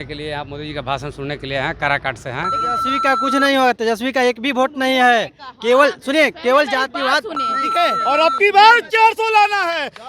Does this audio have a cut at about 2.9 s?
yes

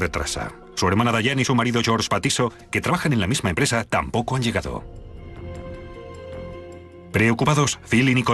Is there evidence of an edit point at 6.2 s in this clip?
no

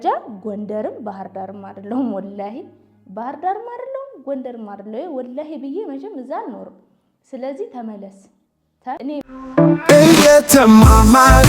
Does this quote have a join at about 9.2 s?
yes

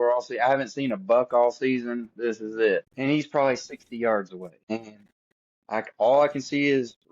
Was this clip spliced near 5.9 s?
no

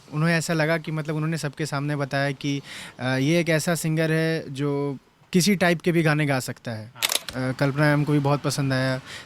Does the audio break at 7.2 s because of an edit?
yes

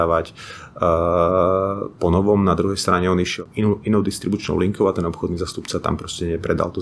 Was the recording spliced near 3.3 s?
yes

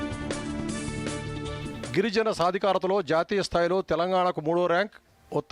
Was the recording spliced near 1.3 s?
yes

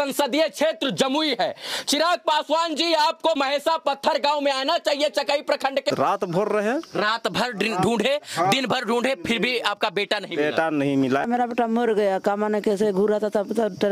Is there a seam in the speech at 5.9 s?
yes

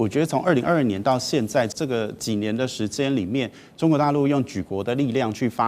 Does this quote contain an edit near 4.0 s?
no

